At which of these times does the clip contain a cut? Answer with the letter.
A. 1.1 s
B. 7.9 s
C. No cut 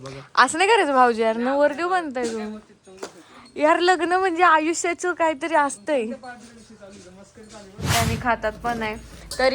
B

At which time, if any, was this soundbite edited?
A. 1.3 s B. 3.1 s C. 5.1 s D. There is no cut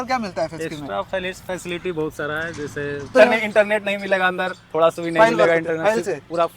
B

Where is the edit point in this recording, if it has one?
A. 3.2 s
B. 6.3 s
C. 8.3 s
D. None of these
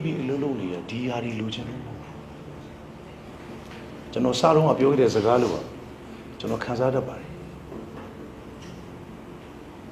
A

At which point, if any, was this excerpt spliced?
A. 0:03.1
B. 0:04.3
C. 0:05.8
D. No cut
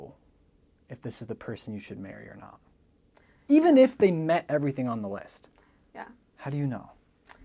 D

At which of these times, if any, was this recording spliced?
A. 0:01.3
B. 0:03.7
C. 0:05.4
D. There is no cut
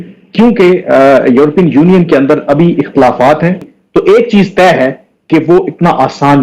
B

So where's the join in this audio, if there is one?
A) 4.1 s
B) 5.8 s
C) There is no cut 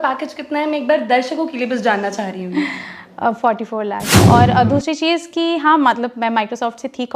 A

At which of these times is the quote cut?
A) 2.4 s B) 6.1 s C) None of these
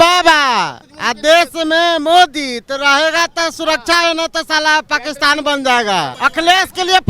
B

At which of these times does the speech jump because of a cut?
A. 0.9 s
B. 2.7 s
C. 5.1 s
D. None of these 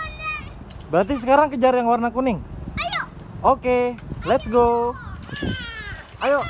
C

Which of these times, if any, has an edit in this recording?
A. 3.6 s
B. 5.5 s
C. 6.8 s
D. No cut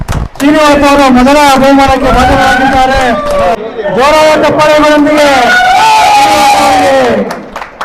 A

